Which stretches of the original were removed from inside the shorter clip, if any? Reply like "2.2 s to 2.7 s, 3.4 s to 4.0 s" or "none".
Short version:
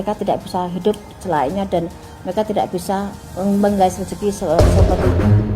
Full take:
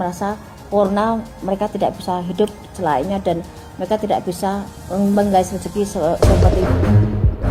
6.1 s to 6.2 s